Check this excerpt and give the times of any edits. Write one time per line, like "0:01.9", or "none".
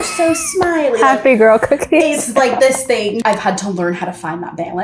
0:03.2